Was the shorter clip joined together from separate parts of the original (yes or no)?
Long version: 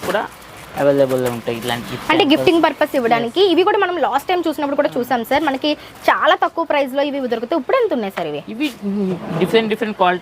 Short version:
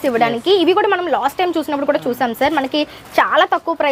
no